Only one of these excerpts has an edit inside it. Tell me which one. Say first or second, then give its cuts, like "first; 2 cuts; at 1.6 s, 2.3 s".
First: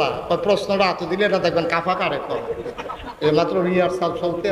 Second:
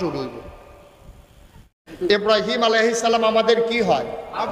second; 1 cut; at 1.6 s